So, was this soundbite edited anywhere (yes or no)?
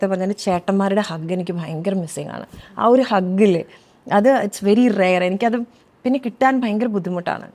no